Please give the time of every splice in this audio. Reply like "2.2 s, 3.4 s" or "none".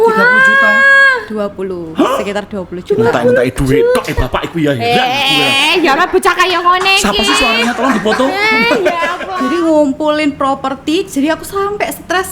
9.2 s